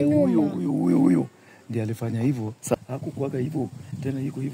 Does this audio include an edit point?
yes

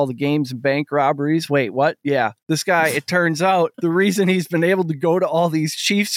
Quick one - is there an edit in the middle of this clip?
yes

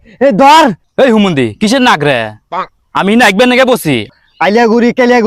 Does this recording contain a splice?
yes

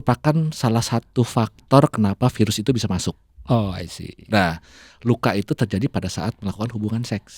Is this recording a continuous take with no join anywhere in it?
yes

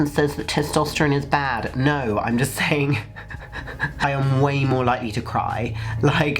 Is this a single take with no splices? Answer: no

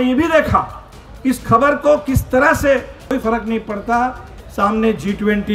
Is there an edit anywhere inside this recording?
yes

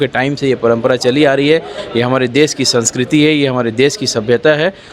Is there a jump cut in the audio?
no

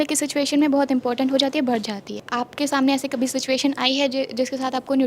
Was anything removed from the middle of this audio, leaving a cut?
yes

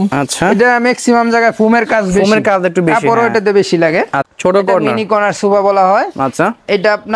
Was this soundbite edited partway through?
yes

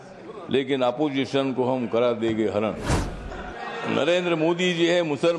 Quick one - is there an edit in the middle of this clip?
yes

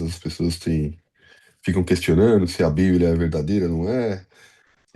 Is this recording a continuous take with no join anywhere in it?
yes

